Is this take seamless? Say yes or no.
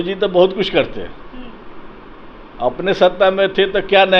yes